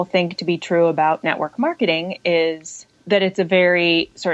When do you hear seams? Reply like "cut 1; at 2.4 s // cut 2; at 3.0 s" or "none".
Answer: cut 1; at 2.9 s